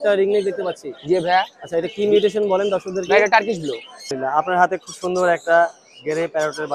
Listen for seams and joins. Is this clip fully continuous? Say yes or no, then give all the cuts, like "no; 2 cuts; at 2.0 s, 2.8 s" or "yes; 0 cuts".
no; 1 cut; at 4.1 s